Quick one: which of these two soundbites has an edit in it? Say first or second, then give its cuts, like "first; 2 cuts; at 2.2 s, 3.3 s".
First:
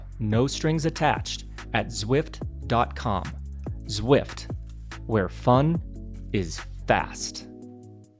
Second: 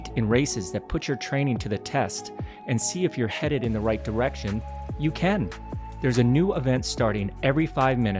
first; 1 cut; at 7.1 s